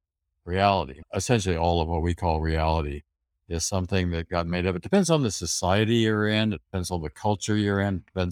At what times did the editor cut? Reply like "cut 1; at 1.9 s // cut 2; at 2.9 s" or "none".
cut 1; at 1.0 s

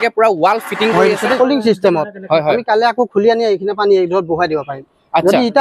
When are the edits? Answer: cut 1; at 1.3 s

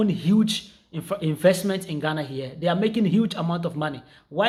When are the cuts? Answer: none

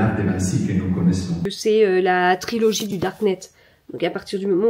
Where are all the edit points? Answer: cut 1; at 1.5 s

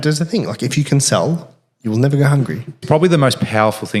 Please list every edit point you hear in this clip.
cut 1; at 2.8 s

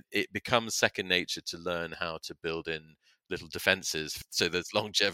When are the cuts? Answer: cut 1; at 4.1 s

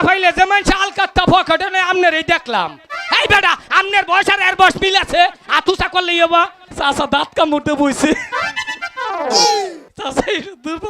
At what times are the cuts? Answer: cut 1; at 6.7 s // cut 2; at 9.9 s

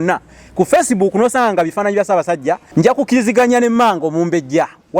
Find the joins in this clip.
cut 1; at 2.6 s

